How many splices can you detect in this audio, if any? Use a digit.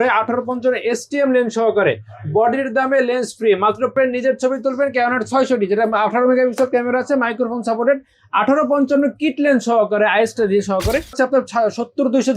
2